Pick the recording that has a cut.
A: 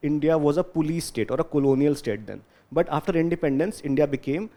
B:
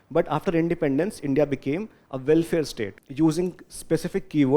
B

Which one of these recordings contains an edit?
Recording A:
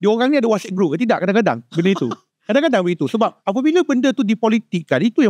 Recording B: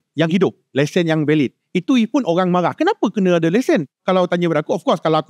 B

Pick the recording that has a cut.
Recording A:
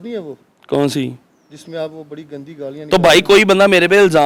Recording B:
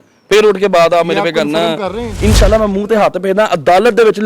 B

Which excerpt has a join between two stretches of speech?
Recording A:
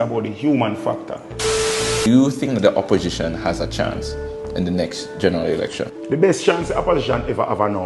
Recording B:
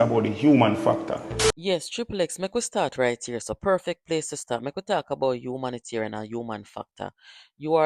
A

